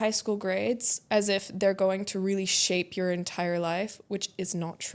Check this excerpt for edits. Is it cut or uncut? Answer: uncut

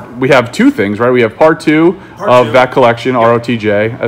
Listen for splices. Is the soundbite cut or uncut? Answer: uncut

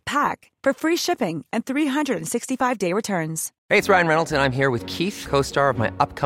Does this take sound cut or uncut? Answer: cut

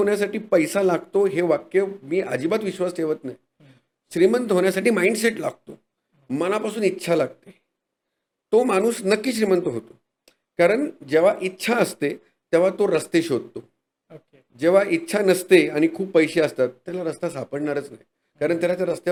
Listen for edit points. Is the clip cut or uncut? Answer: uncut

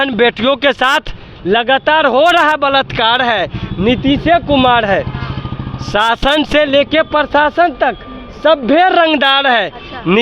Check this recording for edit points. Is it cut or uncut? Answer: uncut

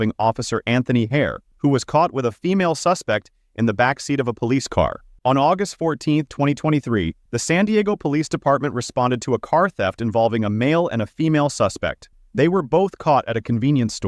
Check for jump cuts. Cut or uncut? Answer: uncut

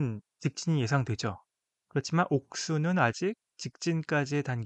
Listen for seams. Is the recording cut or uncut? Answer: cut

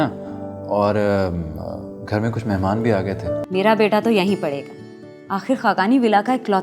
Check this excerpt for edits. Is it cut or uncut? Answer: cut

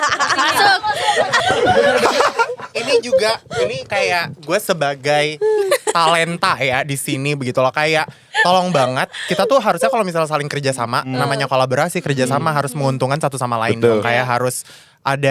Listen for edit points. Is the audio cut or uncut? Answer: cut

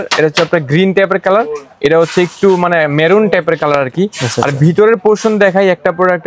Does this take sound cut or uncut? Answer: uncut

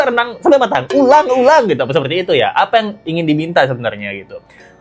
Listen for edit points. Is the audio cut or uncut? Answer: uncut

